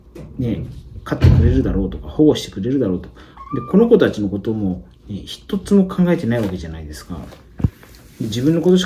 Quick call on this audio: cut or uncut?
uncut